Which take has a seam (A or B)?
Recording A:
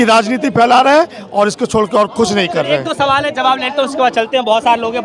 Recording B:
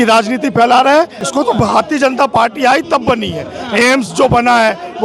B